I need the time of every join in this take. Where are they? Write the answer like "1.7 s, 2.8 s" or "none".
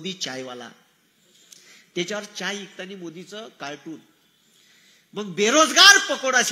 none